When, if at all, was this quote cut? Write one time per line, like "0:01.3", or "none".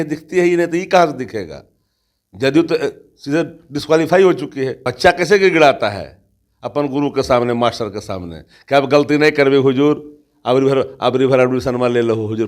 0:04.8